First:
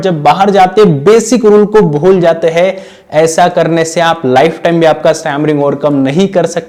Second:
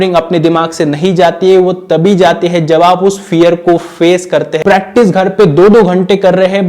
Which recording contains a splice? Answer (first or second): second